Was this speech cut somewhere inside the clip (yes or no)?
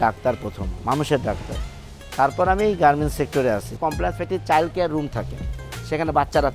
yes